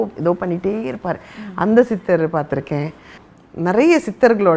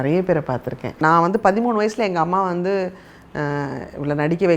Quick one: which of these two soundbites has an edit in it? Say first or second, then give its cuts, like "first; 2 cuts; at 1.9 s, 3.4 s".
second; 1 cut; at 1.0 s